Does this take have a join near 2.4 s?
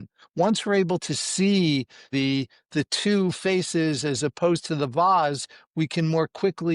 yes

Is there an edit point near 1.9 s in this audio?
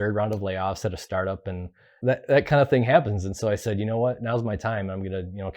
yes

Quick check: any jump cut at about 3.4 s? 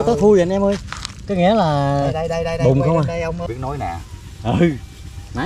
yes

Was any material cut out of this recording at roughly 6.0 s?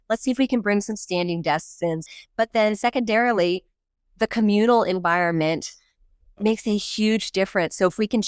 no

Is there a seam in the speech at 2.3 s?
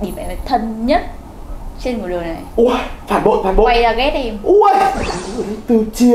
no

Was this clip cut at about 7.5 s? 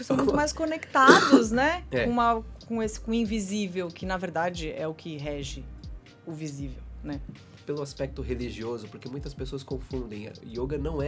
yes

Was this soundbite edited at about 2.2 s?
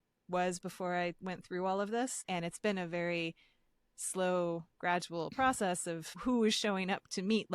yes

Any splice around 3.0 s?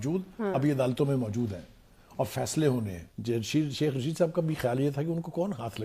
yes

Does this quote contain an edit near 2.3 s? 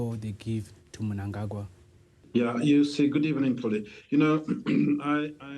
yes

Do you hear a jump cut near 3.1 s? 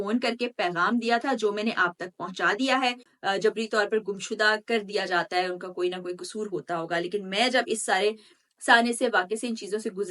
yes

